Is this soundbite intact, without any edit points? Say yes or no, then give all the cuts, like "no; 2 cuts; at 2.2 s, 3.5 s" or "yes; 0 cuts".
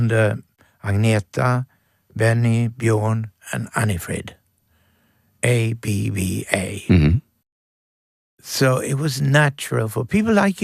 yes; 0 cuts